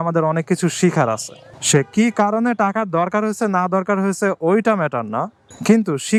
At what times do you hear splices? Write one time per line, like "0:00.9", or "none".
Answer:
none